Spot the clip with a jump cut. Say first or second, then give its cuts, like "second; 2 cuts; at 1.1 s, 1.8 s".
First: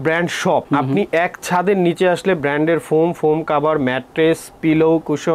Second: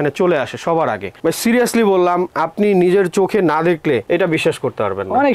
second; 2 cuts; at 1.1 s, 4.0 s